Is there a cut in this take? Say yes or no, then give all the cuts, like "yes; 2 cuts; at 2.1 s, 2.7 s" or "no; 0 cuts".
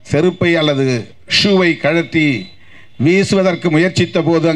no; 0 cuts